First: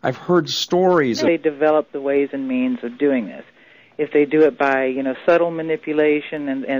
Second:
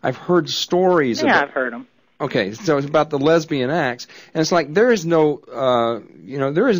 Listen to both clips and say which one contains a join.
second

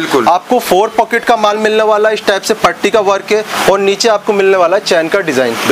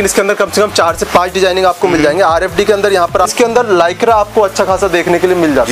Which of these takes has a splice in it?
second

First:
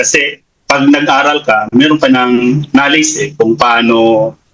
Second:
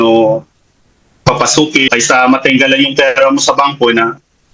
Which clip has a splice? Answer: second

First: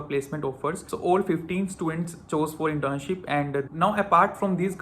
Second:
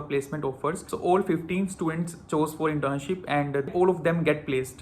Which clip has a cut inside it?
first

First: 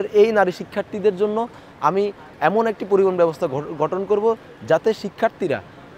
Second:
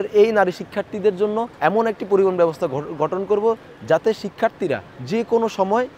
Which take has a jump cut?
second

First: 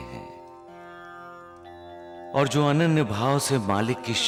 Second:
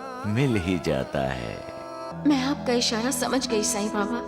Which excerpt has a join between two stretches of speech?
second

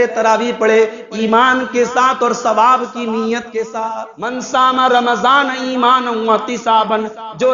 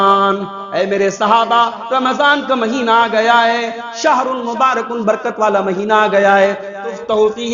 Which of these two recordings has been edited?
first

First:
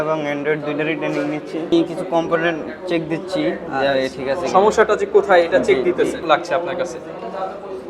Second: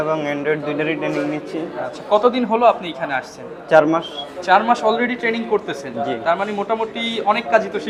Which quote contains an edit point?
first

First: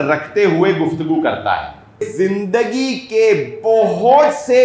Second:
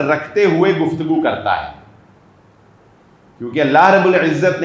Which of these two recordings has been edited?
first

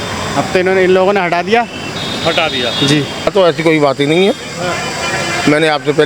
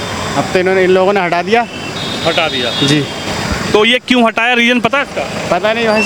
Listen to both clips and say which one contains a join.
first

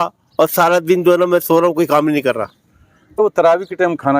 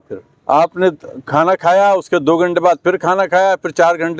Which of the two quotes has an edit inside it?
first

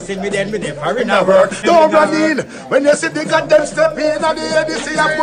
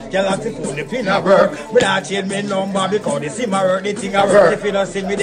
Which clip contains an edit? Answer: first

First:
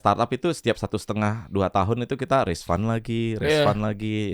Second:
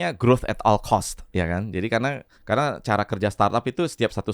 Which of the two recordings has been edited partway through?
second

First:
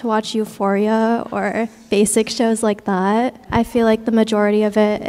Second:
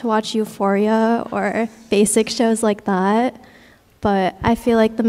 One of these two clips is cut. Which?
first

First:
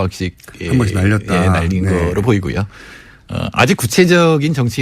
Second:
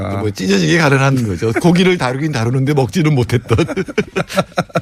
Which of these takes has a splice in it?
first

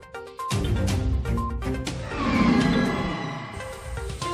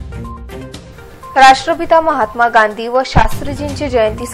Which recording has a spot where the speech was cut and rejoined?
first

